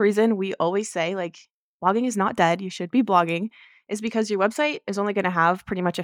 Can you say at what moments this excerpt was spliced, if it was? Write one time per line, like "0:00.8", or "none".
none